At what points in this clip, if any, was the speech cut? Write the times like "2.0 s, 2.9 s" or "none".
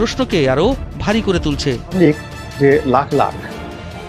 1.9 s